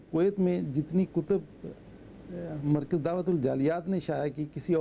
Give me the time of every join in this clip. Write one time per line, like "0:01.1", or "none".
none